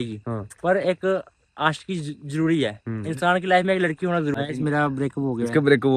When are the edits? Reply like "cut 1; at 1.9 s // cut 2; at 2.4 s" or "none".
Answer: cut 1; at 4.3 s